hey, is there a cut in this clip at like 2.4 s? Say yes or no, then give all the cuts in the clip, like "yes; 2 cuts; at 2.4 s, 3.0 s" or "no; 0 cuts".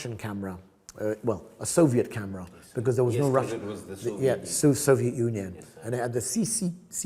no; 0 cuts